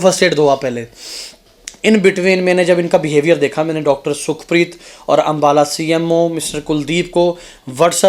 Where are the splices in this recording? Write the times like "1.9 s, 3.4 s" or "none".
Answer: none